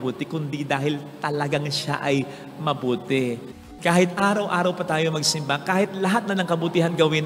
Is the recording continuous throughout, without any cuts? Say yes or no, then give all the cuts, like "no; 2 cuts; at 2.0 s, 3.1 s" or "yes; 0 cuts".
no; 1 cut; at 3.7 s